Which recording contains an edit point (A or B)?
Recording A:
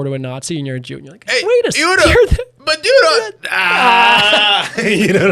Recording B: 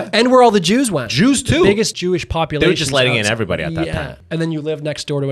B